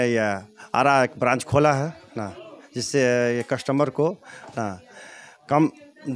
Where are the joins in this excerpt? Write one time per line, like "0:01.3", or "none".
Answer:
none